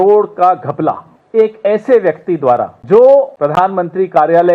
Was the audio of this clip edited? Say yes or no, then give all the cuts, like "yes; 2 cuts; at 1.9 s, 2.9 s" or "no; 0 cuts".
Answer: yes; 3 cuts; at 1.1 s, 2.8 s, 3.3 s